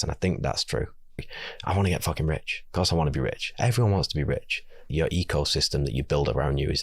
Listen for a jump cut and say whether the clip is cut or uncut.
cut